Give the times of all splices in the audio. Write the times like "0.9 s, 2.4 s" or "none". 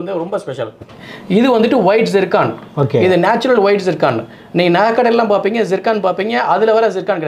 1.2 s